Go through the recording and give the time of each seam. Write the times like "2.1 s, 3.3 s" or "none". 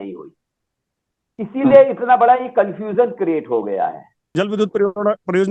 4.3 s